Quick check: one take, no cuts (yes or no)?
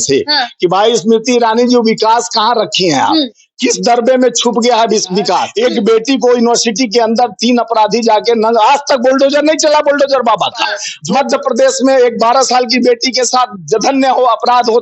no